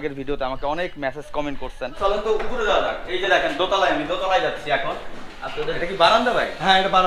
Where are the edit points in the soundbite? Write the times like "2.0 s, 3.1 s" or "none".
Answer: 1.9 s, 5.8 s